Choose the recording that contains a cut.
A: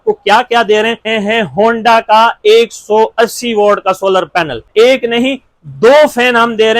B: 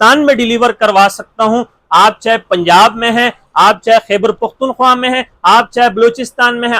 A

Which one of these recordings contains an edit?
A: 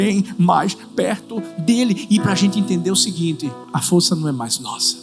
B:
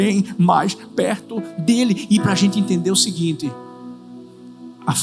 A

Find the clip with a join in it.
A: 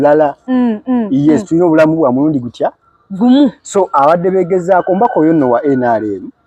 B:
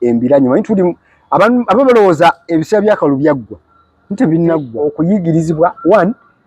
B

